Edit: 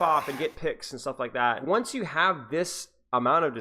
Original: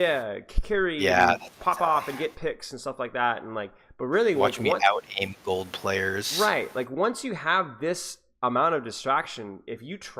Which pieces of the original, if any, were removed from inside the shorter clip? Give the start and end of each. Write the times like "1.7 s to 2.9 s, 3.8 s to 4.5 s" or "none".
3.4 s to 6.9 s